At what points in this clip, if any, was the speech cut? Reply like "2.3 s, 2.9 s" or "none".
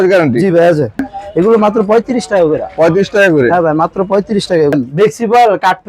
1.1 s, 4.7 s